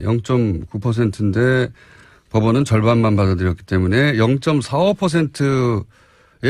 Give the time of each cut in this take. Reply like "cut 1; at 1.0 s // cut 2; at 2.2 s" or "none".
cut 1; at 1.3 s